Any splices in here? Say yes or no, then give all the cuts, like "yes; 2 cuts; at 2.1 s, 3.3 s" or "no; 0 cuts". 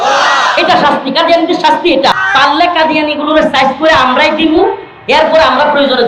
yes; 1 cut; at 2.1 s